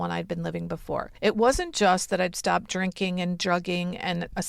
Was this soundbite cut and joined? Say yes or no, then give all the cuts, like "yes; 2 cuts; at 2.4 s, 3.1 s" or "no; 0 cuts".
yes; 1 cut; at 1.1 s